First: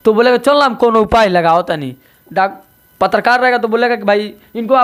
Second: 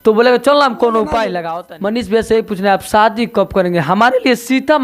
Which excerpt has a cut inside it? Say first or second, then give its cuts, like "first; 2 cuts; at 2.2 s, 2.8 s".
second; 1 cut; at 1.8 s